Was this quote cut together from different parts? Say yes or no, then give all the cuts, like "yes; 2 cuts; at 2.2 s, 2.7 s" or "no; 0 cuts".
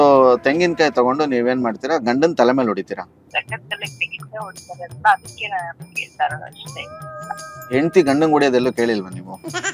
yes; 1 cut; at 3.2 s